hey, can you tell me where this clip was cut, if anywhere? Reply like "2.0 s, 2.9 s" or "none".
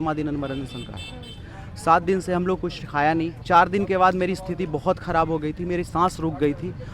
3.4 s